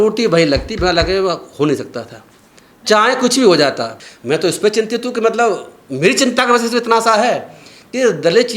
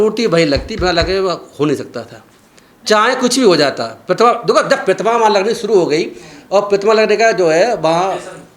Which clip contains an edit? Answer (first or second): first